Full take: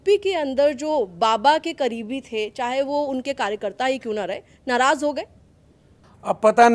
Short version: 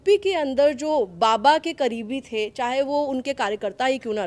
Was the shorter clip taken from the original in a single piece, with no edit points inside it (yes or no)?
yes